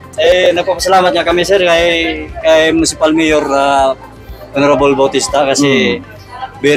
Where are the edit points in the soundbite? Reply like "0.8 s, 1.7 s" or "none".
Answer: none